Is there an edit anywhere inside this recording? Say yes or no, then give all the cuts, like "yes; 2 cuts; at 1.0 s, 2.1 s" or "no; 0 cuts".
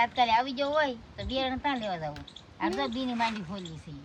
no; 0 cuts